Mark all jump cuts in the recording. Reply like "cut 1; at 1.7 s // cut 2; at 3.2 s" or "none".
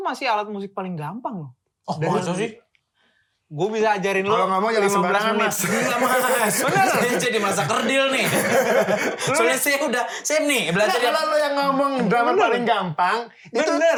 none